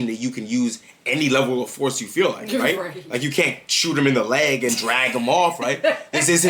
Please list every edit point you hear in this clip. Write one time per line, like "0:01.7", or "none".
none